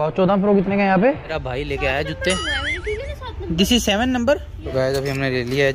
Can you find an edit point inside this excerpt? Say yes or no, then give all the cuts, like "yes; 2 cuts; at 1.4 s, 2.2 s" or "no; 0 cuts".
yes; 2 cuts; at 1.3 s, 4.6 s